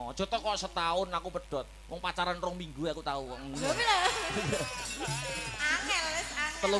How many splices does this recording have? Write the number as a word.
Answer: zero